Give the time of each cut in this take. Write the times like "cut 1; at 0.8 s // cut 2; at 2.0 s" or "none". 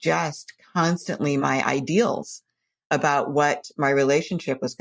cut 1; at 1.4 s